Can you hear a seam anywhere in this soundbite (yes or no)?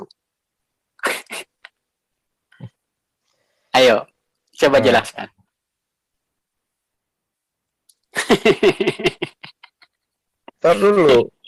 no